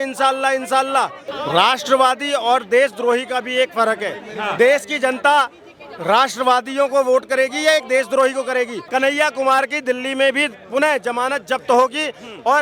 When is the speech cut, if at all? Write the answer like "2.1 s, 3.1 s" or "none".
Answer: 1.3 s, 8.8 s